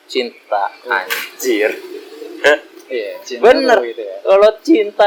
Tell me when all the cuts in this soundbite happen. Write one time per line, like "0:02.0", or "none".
none